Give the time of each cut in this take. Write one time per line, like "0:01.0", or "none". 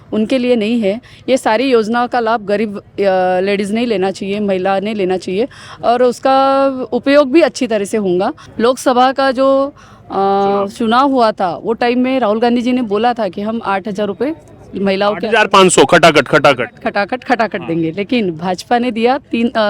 0:08.4